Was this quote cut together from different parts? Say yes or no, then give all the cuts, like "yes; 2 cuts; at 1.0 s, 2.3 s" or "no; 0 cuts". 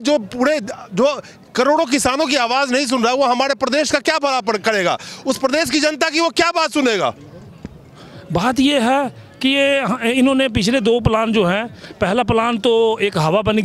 no; 0 cuts